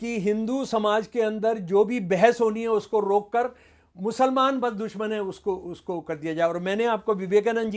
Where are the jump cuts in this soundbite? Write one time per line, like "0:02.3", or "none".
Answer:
none